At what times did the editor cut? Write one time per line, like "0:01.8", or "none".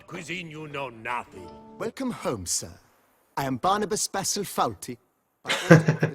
0:01.8

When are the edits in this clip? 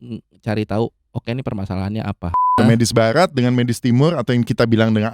0:02.5

